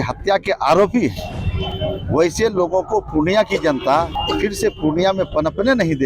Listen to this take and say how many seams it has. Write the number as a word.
one